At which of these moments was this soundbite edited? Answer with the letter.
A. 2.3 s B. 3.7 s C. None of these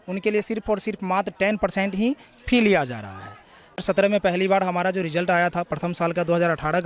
B